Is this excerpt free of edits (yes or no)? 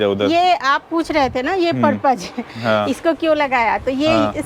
yes